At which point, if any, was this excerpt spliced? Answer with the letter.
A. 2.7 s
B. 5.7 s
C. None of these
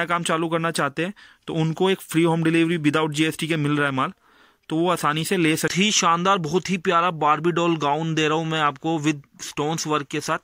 B